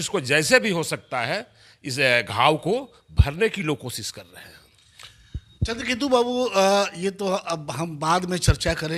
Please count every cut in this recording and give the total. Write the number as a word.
zero